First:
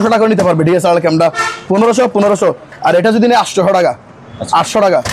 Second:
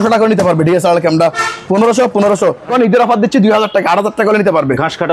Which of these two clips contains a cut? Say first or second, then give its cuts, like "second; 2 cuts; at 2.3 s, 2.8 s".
second; 1 cut; at 2.7 s